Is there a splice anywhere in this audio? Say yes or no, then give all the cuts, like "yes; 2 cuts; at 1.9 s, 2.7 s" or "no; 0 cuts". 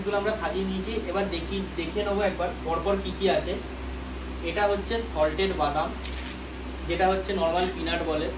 no; 0 cuts